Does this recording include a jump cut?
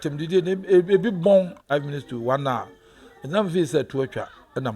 yes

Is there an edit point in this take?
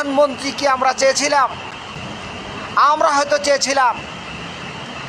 no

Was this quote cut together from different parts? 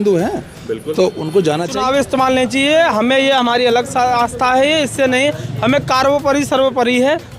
yes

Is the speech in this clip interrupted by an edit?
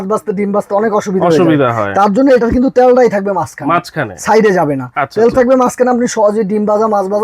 no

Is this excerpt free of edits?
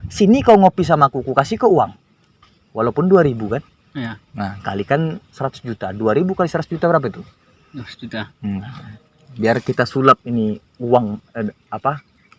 yes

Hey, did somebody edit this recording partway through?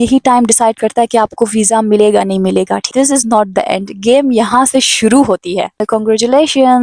yes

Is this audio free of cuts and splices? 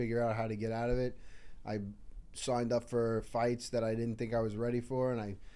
yes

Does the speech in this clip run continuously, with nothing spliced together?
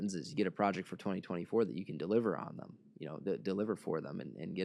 yes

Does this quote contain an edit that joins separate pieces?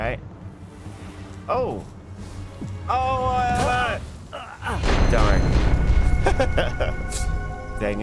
no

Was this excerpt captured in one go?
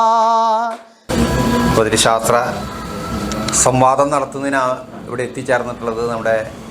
no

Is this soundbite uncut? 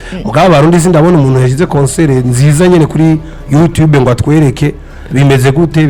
yes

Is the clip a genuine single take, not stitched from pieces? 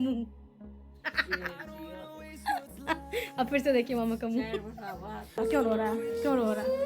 no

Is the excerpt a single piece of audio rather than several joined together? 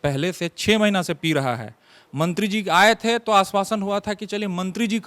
yes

